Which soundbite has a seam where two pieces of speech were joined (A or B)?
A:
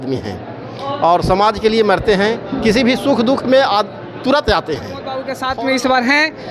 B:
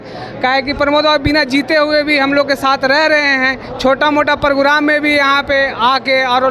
A